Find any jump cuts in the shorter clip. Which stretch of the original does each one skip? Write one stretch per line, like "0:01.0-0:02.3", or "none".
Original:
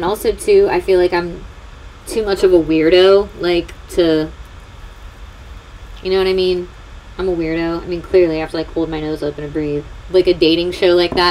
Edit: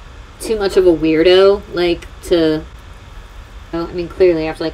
0:05.4-0:07.7